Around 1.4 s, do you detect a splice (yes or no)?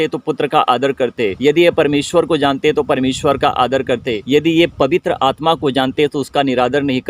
yes